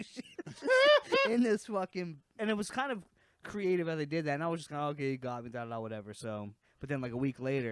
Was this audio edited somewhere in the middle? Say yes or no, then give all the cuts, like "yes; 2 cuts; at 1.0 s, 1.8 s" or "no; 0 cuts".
yes; 2 cuts; at 2.3 s, 6.6 s